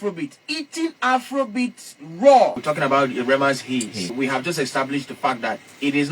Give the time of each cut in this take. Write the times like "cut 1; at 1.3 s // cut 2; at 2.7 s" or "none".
cut 1; at 2.6 s // cut 2; at 4.1 s